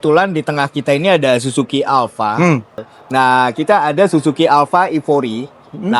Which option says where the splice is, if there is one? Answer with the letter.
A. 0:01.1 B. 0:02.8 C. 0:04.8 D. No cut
B